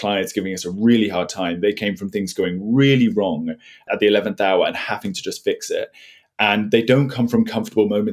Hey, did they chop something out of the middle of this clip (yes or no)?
yes